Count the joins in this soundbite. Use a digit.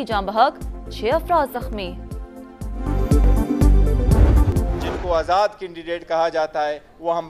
1